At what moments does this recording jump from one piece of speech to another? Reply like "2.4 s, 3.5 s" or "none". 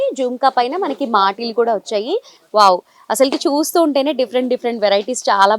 2.4 s